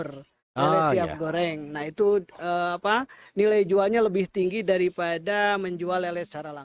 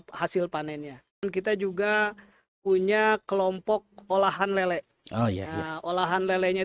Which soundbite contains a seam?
second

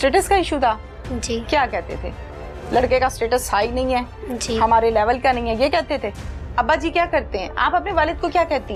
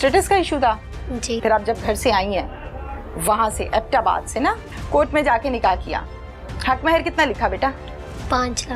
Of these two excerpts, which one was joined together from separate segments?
second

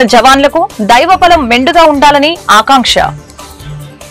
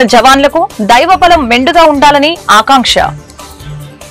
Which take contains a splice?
first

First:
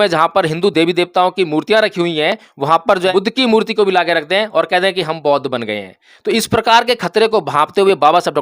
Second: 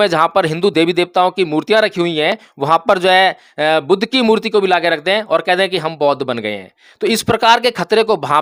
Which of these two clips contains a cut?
first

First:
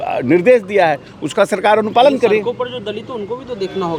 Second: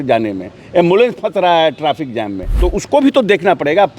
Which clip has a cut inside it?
second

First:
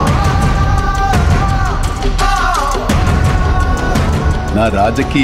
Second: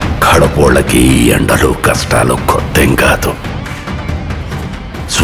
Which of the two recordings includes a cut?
first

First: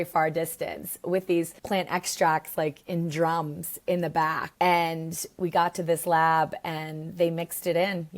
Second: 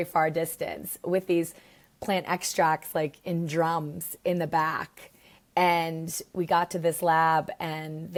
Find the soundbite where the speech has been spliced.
first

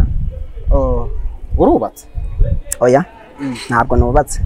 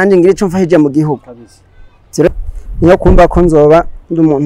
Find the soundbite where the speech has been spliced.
second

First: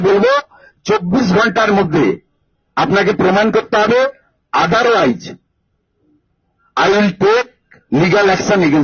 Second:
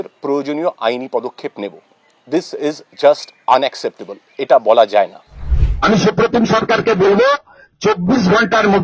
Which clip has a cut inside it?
second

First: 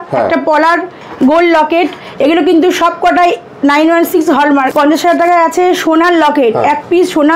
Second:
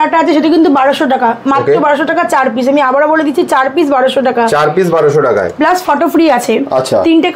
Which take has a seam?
first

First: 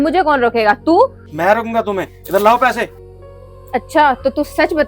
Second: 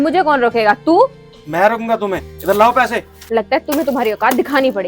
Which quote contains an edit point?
first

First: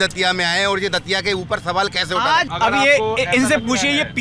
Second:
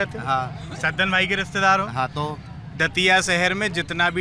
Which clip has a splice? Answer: first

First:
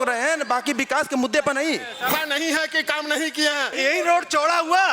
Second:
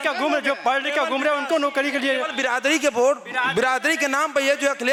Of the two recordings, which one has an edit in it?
first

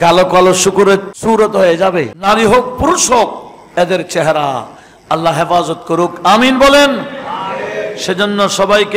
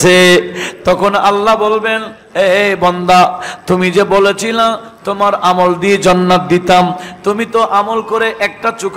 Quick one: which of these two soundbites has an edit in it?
first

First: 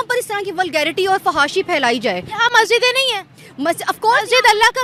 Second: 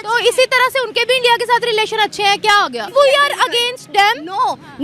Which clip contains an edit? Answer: second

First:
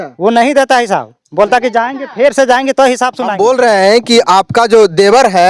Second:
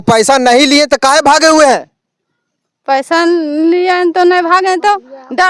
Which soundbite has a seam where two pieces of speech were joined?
first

